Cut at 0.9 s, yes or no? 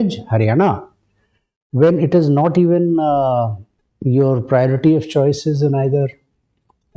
no